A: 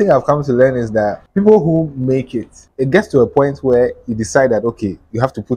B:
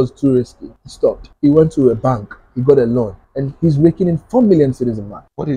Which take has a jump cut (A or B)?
A